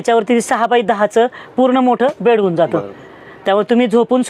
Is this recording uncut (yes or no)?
yes